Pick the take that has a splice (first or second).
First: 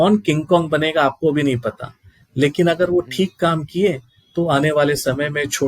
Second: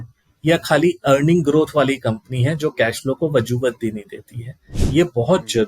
second